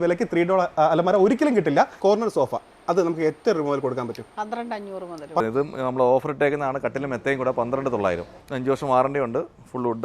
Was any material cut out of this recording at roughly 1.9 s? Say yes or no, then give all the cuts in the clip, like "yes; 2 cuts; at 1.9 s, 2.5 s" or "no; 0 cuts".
yes; 3 cuts; at 1.9 s, 5.4 s, 8.4 s